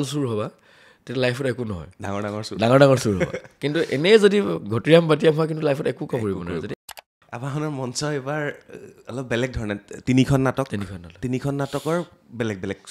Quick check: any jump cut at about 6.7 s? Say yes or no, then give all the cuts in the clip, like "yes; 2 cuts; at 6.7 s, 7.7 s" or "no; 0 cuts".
yes; 1 cut; at 6.7 s